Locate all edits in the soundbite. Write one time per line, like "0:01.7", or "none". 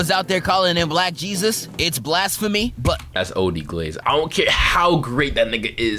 none